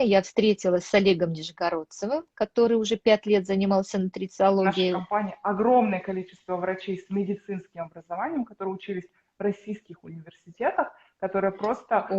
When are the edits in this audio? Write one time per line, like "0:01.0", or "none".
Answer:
0:05.0